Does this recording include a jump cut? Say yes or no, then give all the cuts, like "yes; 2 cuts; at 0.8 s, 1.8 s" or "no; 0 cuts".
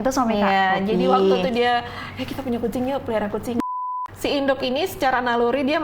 yes; 1 cut; at 3.8 s